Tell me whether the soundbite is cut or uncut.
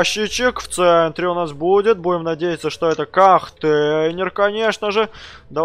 uncut